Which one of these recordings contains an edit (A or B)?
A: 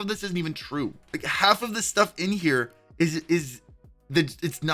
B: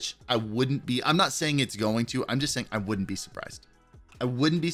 A